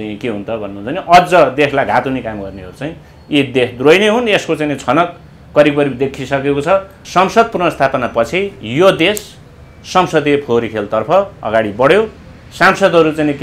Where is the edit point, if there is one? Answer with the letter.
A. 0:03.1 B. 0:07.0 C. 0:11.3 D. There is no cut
B